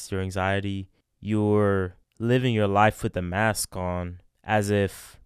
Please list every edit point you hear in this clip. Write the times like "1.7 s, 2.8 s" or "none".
none